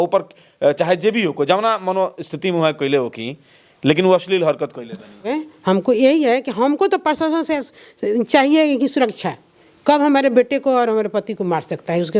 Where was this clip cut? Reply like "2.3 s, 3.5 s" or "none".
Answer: 5.4 s

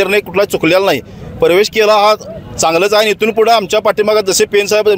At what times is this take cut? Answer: 1.2 s

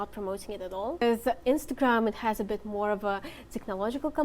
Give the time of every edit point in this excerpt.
1.0 s

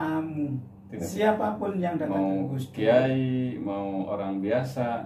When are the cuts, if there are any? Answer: 1.0 s

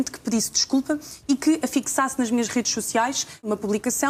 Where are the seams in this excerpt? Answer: none

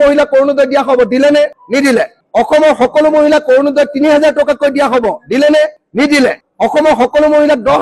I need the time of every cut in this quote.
none

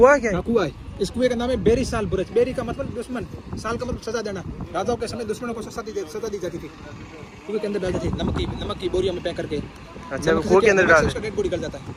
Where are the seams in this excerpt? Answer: none

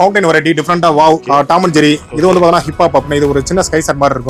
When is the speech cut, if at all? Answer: none

